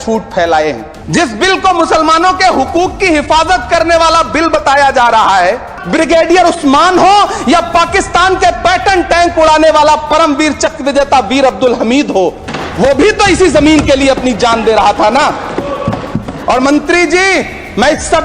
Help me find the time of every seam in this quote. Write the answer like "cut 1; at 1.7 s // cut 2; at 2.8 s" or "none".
cut 1; at 0.9 s // cut 2; at 5.7 s